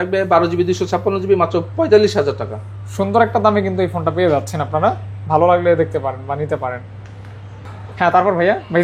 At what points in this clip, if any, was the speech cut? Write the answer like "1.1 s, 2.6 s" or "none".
none